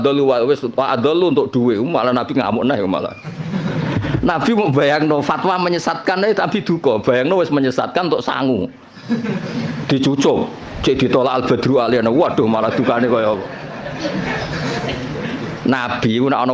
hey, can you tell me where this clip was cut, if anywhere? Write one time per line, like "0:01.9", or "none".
none